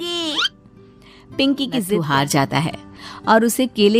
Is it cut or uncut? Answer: cut